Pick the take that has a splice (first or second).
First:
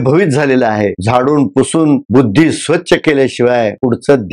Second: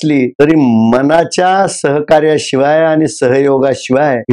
first